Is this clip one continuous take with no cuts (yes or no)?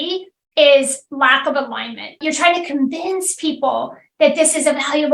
no